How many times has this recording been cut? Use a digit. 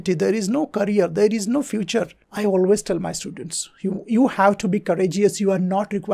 1